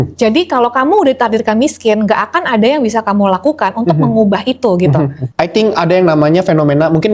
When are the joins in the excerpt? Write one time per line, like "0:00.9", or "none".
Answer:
0:05.2